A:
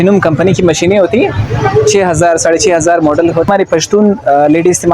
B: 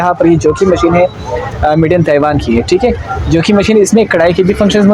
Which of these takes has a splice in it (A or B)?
A